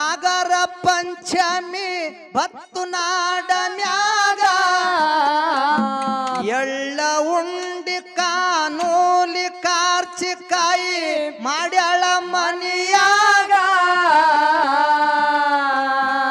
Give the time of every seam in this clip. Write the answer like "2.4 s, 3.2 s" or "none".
5.8 s